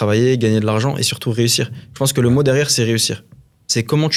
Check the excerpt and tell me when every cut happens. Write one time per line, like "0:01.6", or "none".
none